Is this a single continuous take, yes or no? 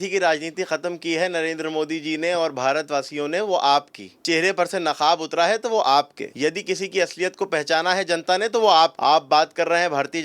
no